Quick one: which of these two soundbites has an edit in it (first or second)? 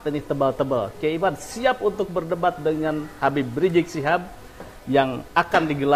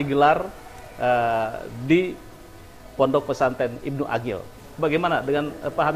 second